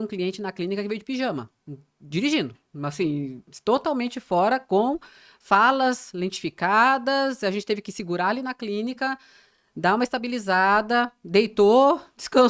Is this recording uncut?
yes; 0 cuts

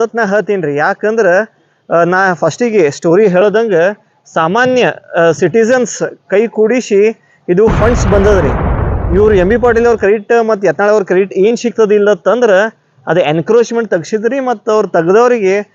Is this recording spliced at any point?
no; 0 cuts

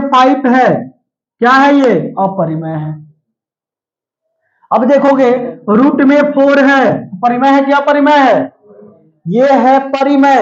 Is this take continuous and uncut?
yes; 0 cuts

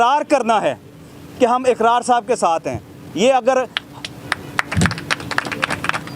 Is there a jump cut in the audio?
no; 0 cuts

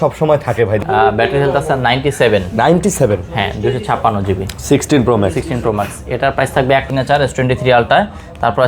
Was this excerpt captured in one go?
no; 2 cuts; at 0.8 s, 6.9 s

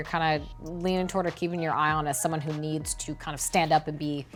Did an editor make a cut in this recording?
no; 0 cuts

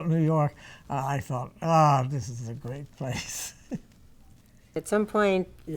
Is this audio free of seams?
yes; 0 cuts

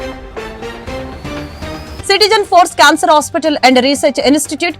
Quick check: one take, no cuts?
no; 1 cut; at 1.9 s

